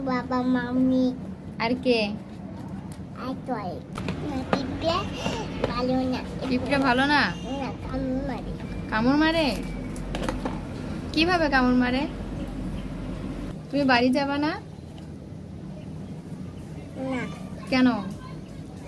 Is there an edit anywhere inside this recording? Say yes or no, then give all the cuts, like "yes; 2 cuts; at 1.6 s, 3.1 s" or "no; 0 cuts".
yes; 2 cuts; at 4.0 s, 13.5 s